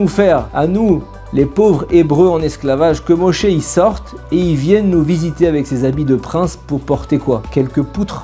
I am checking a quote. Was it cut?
no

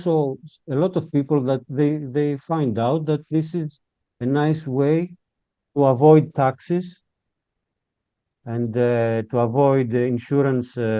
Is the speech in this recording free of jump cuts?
yes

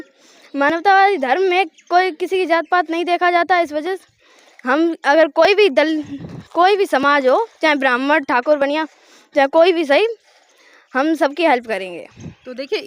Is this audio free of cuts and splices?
yes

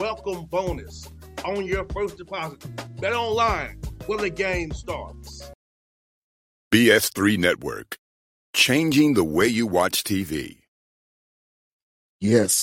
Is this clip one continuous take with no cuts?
no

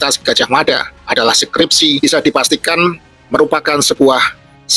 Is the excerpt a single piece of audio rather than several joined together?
no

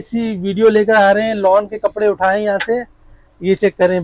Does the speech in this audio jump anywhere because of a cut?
no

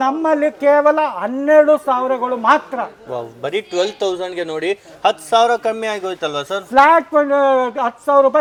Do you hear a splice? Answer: no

